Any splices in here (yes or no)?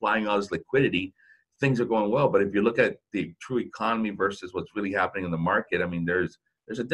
no